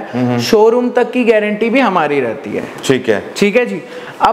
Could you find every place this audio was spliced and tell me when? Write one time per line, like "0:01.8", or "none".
none